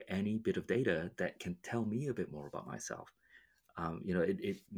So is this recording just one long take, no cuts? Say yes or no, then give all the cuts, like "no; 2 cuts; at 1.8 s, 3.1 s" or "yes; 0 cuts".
yes; 0 cuts